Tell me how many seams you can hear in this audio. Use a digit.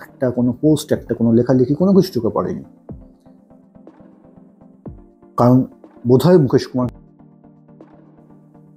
2